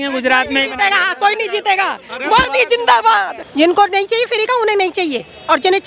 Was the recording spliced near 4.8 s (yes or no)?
no